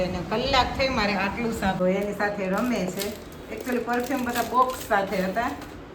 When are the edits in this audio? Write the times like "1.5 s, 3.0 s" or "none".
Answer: 1.8 s